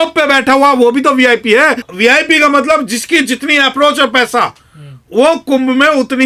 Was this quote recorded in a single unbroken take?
no; 1 cut; at 1.9 s

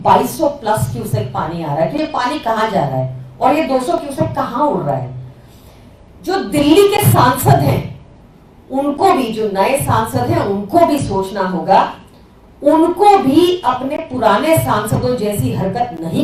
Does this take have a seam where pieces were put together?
no; 0 cuts

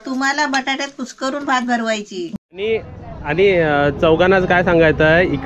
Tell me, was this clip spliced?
yes; 1 cut; at 2.3 s

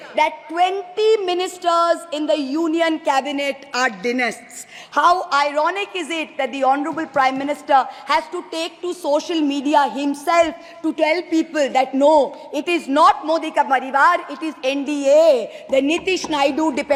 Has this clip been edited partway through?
no; 0 cuts

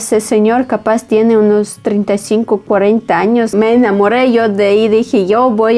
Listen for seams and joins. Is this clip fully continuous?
no; 1 cut; at 3.5 s

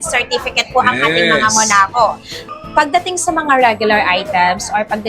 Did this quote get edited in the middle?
yes; 1 cut; at 2.3 s

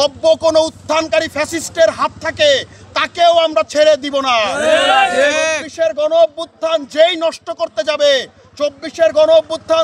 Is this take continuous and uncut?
yes; 0 cuts

